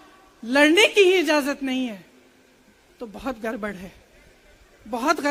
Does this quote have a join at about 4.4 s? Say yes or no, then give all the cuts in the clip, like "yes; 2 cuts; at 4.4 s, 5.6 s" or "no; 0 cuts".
no; 0 cuts